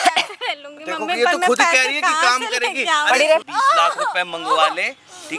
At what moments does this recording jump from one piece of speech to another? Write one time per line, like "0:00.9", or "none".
0:03.4